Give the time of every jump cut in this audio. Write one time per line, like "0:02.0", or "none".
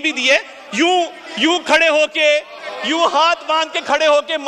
none